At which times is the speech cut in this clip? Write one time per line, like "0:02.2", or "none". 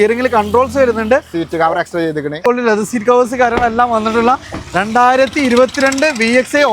0:02.4